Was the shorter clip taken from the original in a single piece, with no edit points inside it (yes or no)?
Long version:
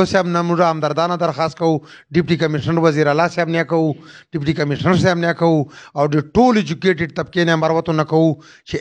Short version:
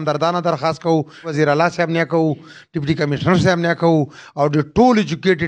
no